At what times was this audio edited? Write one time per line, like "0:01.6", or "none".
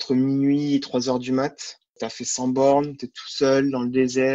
0:02.0

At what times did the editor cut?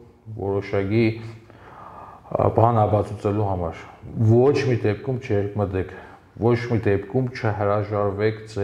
none

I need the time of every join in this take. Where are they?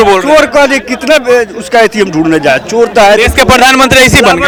none

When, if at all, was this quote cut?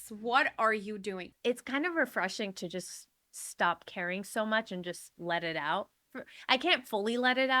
0:01.3

